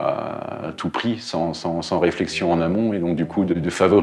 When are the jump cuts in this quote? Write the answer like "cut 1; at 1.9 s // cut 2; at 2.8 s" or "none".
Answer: none